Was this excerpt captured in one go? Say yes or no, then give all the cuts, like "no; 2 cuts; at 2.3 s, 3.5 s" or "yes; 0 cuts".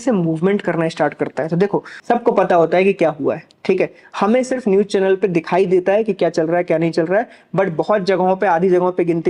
no; 1 cut; at 1.9 s